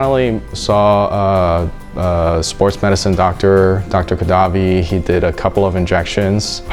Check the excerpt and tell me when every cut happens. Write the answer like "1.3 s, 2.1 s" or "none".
none